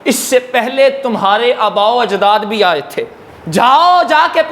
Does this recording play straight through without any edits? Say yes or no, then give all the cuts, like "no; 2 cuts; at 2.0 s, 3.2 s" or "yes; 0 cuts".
yes; 0 cuts